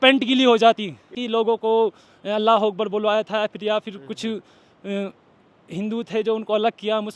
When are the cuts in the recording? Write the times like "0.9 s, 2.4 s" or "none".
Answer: 1.2 s